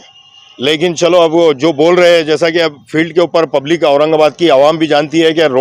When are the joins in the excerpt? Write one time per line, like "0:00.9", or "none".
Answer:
none